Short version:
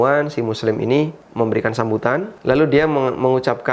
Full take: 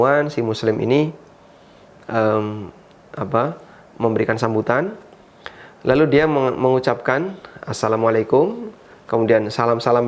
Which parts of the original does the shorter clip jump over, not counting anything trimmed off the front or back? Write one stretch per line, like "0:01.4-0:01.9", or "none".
0:01.2-0:03.8
0:05.0-0:05.7

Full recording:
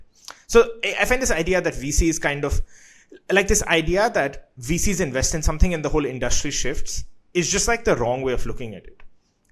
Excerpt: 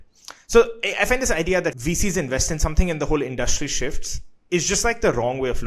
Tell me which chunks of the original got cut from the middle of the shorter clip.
0:01.8-0:04.6

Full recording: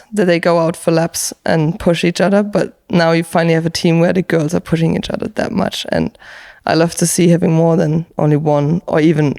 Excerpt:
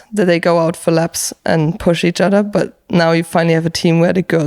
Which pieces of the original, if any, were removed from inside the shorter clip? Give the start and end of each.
none

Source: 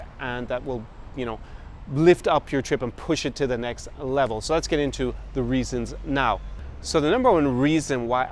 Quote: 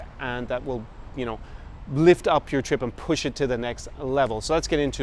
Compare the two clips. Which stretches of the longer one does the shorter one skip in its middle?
none

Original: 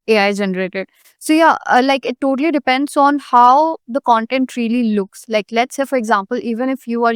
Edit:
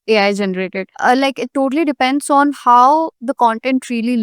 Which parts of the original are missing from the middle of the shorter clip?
0:01.0-0:01.6

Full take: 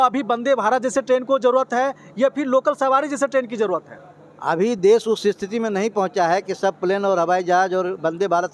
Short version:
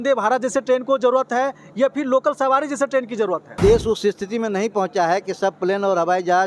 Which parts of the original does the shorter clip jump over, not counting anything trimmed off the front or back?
0:04.0-0:04.8

